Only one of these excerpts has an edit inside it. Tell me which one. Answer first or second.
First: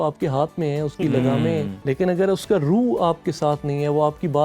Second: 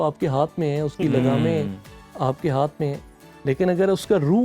first